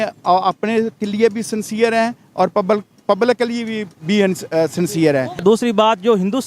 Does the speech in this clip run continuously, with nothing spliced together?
no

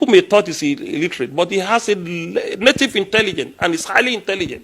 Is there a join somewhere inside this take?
no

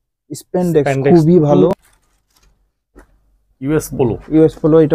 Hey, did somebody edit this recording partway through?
yes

